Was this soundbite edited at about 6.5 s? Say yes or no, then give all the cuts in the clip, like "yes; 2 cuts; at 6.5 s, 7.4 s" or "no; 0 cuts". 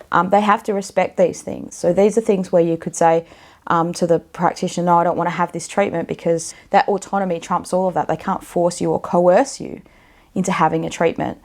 yes; 1 cut; at 6.5 s